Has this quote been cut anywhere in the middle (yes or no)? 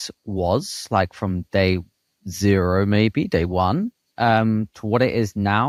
no